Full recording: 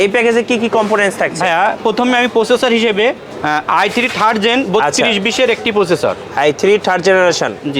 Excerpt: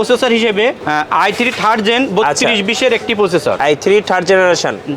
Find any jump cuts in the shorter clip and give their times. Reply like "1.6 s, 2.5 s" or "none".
0.8 s, 3.6 s